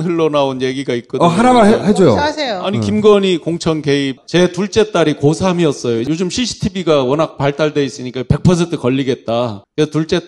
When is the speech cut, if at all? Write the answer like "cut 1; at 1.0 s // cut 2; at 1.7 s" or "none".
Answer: cut 1; at 4.2 s